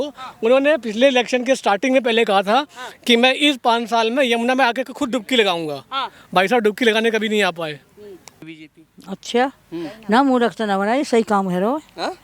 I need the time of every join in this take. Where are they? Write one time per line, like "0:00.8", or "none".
0:08.6